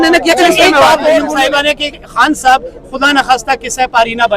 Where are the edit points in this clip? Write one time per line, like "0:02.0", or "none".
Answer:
0:01.3